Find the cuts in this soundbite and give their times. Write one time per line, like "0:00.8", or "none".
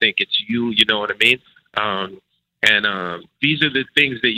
none